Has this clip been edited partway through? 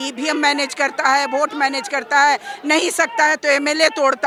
no; 0 cuts

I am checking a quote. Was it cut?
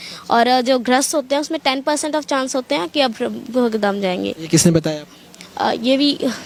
no; 0 cuts

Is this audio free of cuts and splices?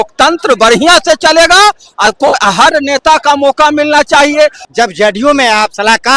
no; 1 cut; at 4.6 s

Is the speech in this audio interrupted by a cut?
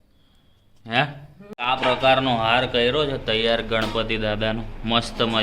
yes; 1 cut; at 1.3 s

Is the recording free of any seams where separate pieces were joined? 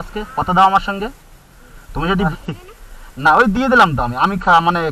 no; 1 cut; at 2.3 s

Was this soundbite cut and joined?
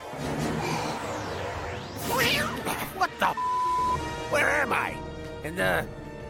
no; 0 cuts

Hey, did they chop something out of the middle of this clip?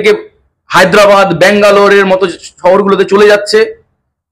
no; 0 cuts

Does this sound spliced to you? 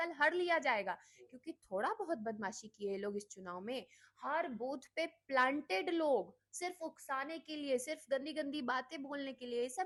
no; 0 cuts

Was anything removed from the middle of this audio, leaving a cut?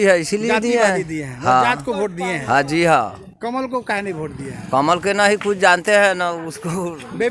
no; 0 cuts

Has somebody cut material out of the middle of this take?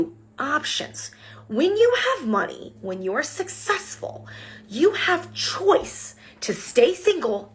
no; 0 cuts

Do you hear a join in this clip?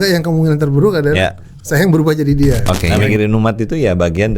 yes; 1 cut; at 2.9 s

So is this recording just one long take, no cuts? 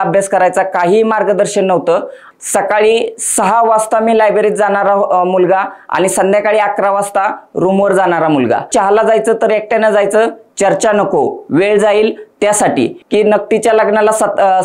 no; 3 cuts; at 2.2 s, 8.7 s, 13.0 s

